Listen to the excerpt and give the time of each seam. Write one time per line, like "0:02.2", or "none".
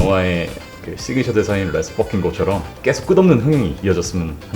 0:02.7
0:03.8